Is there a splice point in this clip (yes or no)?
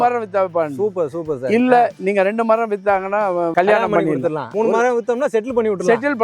yes